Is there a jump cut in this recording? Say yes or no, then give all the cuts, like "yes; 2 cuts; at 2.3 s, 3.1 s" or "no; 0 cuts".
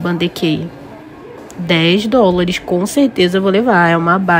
no; 0 cuts